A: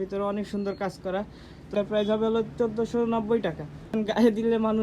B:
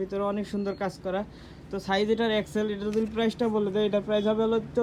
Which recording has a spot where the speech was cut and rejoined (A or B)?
A